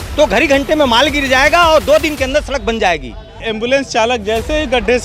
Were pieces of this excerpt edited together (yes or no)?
yes